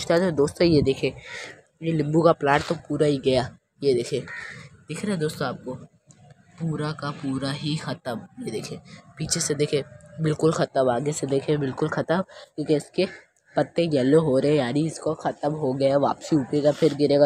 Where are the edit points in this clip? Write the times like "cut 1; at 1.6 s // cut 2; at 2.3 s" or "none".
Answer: none

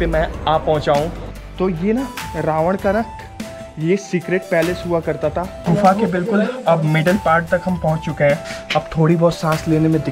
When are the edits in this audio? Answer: cut 1; at 1.1 s // cut 2; at 5.7 s // cut 3; at 8.5 s

